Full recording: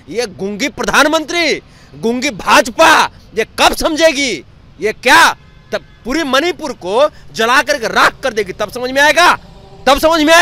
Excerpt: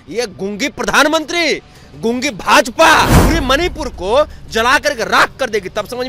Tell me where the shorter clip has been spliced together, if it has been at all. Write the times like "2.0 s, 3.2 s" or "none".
3.2 s